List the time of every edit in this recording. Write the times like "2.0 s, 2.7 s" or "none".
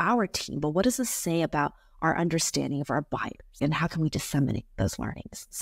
3.5 s